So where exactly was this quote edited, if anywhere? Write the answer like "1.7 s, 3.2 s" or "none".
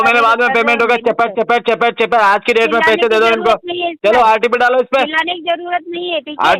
none

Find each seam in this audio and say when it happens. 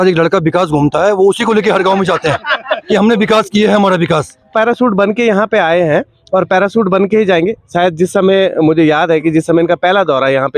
4.5 s

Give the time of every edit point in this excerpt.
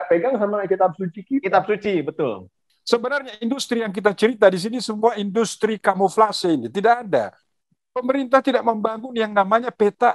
2.6 s

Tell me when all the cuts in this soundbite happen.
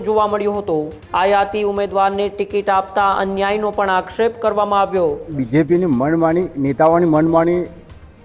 1.0 s, 5.3 s

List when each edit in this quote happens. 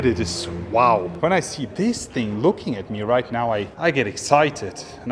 1.1 s

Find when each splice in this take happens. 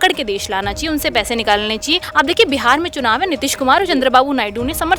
2.0 s

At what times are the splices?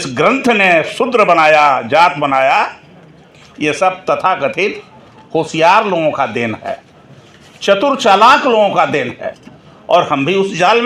none

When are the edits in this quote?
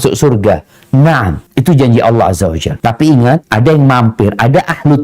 1.4 s, 2.7 s, 3.5 s

